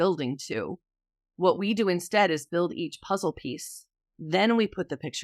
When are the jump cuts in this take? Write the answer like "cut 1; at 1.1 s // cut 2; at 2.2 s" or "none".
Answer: none